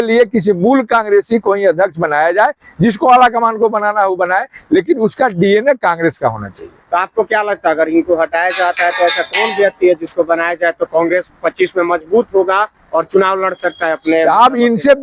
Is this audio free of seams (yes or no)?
yes